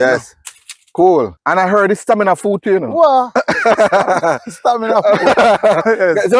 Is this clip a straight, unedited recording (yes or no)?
no